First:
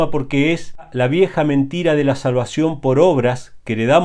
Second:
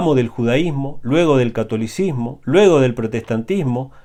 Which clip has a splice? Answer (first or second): first